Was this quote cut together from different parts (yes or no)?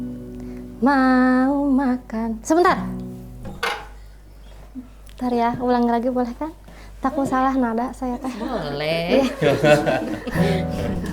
no